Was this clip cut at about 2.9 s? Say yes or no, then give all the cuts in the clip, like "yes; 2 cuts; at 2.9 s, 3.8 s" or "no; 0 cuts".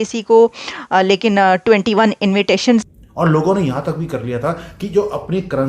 yes; 1 cut; at 2.9 s